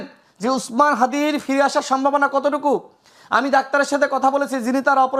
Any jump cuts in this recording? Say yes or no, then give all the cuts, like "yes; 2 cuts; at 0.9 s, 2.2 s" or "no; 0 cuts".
no; 0 cuts